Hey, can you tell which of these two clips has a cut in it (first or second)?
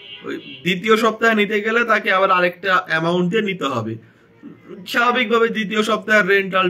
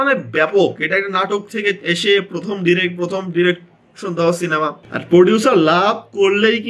second